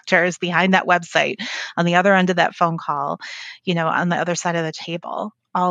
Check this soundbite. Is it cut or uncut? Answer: uncut